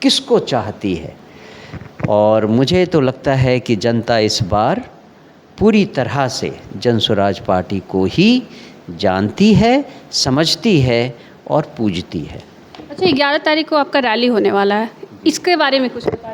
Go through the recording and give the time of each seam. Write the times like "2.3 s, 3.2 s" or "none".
none